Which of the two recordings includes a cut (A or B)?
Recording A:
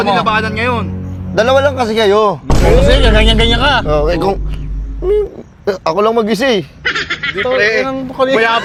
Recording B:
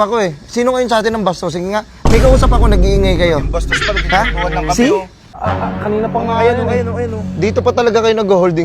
B